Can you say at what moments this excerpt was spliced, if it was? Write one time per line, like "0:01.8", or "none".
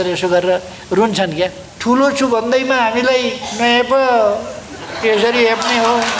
0:01.7